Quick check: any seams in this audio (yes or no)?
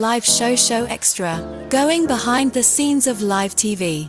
no